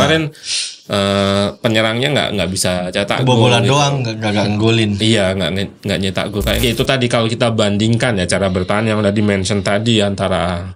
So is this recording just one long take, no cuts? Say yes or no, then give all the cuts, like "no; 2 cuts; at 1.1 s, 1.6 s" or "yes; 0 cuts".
no; 1 cut; at 6.6 s